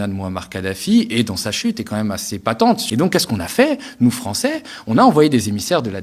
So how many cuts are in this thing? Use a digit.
1